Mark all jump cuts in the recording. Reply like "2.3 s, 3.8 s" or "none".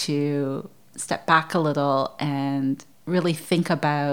2.9 s